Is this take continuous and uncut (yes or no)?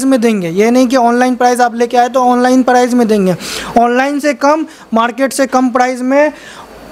yes